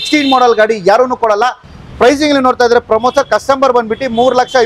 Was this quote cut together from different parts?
yes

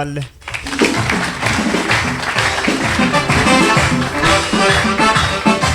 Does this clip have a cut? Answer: no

